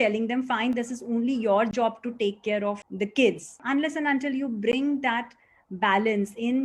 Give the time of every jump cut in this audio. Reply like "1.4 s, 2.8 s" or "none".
2.9 s, 3.6 s